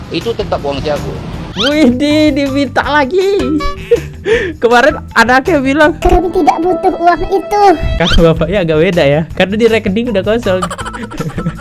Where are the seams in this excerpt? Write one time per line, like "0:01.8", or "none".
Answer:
none